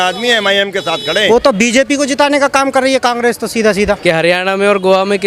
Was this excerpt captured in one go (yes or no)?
no